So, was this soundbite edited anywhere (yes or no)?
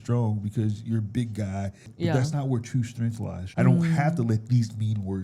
yes